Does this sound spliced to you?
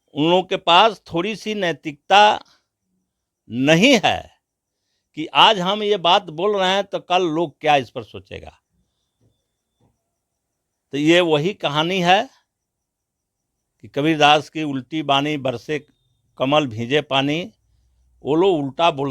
no; 0 cuts

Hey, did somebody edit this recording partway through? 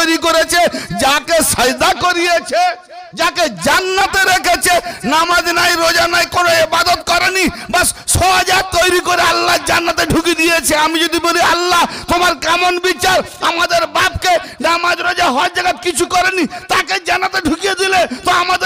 no; 0 cuts

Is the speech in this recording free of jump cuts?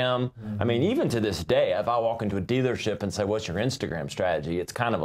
yes; 0 cuts

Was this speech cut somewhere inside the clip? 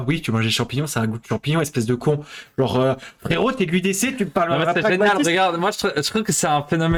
no; 0 cuts

